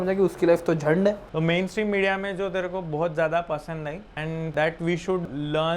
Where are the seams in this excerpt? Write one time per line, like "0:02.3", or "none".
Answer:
0:01.2